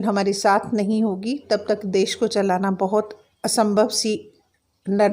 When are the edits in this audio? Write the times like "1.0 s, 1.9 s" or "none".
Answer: none